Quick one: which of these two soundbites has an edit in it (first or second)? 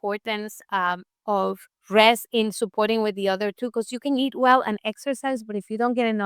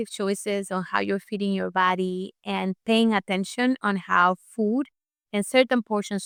first